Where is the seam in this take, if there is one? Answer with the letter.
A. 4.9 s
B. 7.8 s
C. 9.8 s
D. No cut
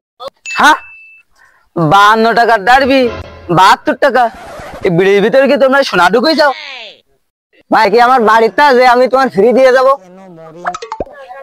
B